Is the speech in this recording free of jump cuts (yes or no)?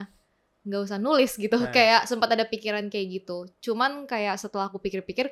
yes